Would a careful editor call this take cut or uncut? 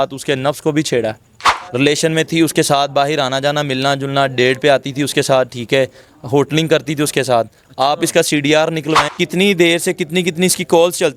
cut